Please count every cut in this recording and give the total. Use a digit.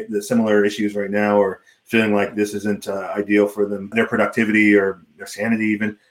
1